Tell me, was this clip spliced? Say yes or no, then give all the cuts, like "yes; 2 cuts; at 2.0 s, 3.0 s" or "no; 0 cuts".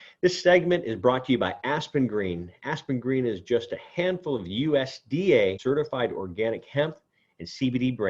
yes; 1 cut; at 5.6 s